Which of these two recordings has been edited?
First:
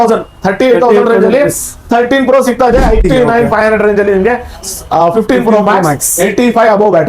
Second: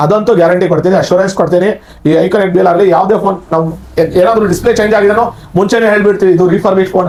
first; 1 cut; at 3.0 s

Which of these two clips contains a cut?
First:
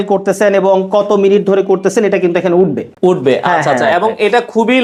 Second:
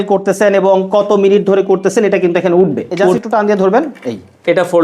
second; 1 cut; at 3.2 s

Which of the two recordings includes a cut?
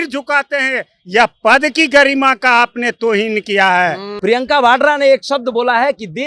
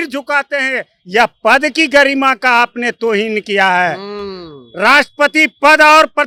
first; 1 cut; at 4.1 s

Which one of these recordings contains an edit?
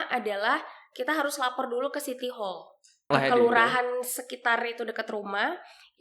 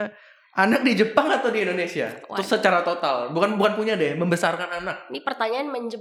first; 1 cut; at 3.1 s

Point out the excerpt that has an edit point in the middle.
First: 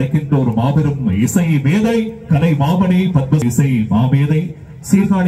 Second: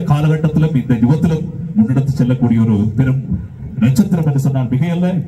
first; 1 cut; at 3.4 s

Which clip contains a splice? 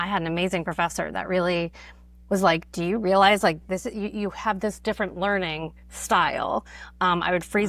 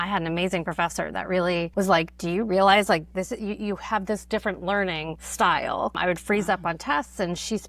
second; 3 cuts; at 1.7 s, 5.2 s, 6.0 s

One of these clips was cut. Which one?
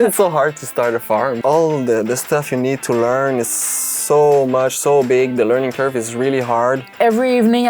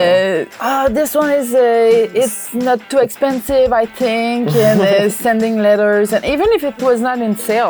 first; 2 cuts; at 1.4 s, 6.9 s

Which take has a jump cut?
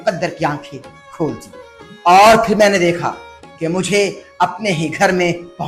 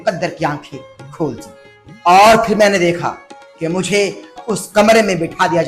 second; 1 cut; at 4.3 s

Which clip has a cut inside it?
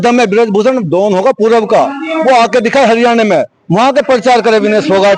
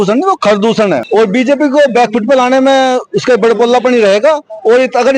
second; 1 cut; at 1.0 s

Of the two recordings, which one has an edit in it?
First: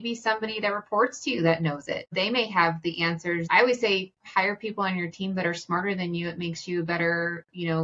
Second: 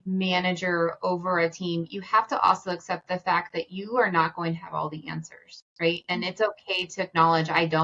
first; 2 cuts; at 2.1 s, 3.5 s

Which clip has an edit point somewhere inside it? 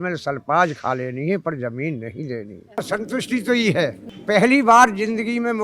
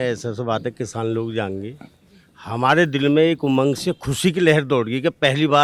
first; 2 cuts; at 2.8 s, 4.1 s

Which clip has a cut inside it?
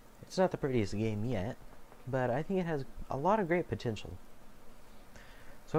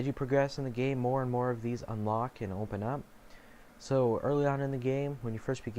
second; 1 cut; at 4.7 s

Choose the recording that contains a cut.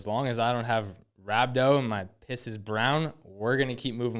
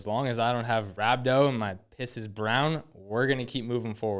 second; 1 cut; at 0.9 s

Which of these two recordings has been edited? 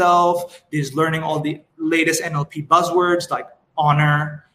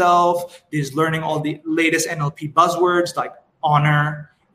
second; 1 cut; at 1.6 s

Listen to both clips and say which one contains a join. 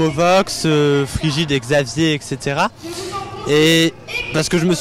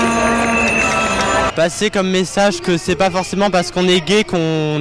second; 1 cut; at 1.5 s

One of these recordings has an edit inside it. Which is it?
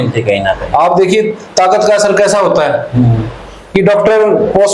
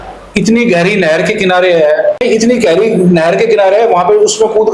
second; 1 cut; at 2.2 s

